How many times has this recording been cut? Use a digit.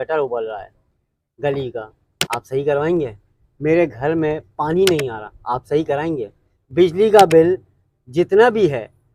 0